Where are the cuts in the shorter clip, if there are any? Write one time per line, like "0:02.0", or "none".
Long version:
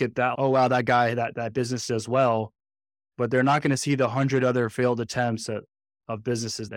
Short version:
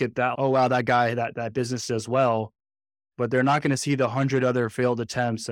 none